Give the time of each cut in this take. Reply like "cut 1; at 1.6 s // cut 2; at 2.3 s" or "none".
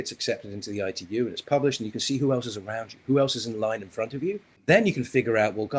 cut 1; at 4.6 s